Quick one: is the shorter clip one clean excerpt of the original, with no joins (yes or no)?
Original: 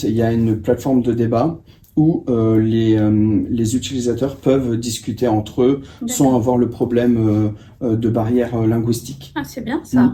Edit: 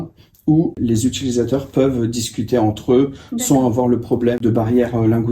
no